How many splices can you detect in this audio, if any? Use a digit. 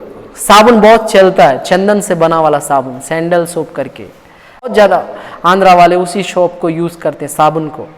1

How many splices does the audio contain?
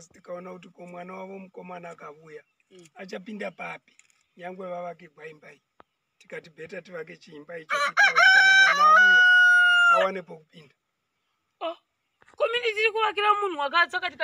0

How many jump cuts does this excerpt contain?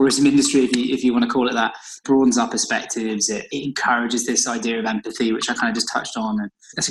0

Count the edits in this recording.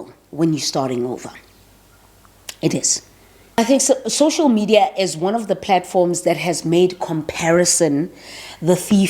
1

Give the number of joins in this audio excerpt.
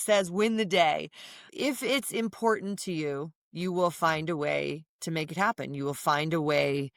0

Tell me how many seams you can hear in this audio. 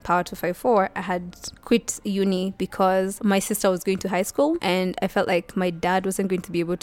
0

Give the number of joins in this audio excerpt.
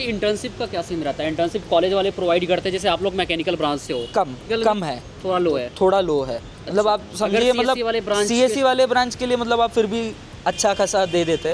0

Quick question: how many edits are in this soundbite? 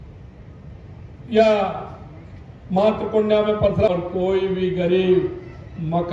1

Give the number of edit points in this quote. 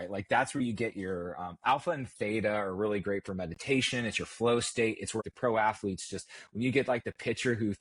1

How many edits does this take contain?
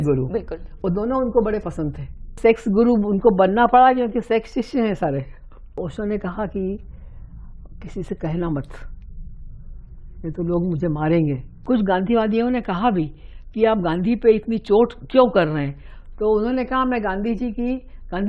3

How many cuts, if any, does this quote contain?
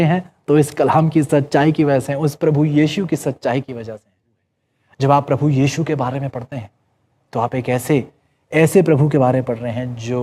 1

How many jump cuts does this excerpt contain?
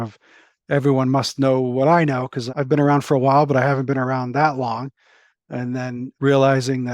2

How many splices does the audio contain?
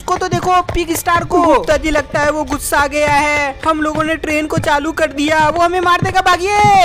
1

